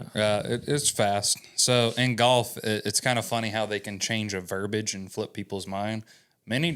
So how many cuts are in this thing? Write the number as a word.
zero